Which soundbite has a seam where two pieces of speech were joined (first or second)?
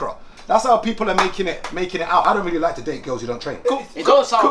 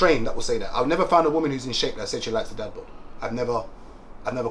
first